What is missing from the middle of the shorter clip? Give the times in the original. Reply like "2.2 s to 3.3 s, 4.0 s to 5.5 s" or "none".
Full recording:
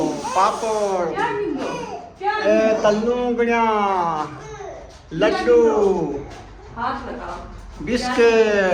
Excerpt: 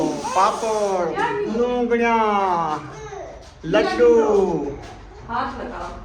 1.5 s to 3.0 s